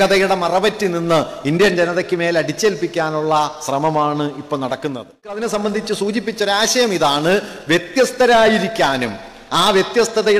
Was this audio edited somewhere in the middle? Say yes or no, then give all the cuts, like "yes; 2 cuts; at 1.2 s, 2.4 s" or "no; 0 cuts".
yes; 1 cut; at 5.4 s